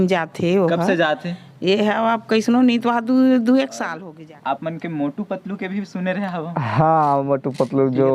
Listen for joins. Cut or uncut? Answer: cut